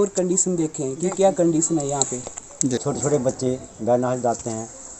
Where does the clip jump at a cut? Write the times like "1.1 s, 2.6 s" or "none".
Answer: 2.8 s